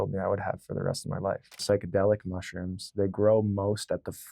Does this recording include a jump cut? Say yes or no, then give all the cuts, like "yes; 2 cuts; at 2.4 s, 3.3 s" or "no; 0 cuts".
yes; 1 cut; at 1.6 s